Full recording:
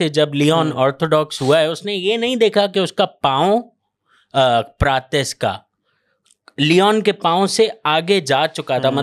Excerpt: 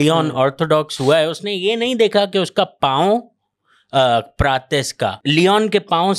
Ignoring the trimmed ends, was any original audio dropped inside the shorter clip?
yes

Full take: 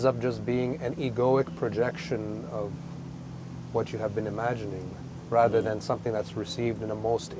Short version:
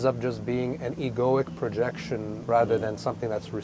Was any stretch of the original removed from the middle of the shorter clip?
yes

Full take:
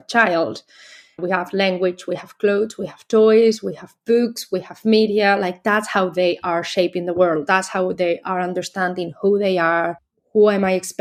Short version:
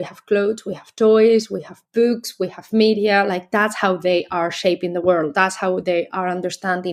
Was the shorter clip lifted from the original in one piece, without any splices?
yes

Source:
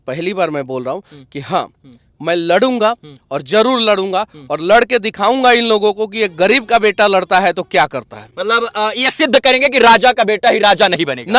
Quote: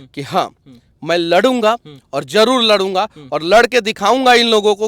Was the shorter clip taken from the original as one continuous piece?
yes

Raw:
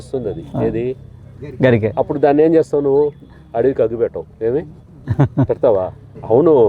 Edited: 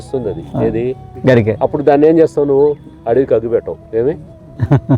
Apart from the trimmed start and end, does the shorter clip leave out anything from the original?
yes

